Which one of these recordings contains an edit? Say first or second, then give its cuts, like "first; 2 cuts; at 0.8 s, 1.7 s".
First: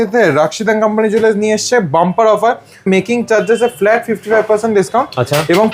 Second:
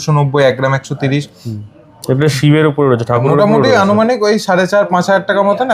first; 1 cut; at 2.9 s